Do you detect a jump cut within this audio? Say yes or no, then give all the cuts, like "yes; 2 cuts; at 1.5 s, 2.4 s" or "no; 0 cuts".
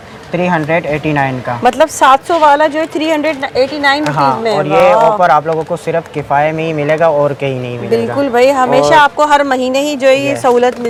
no; 0 cuts